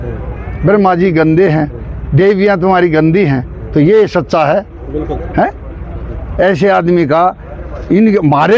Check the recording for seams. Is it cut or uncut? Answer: uncut